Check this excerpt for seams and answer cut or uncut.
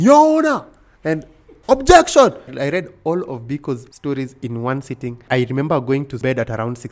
cut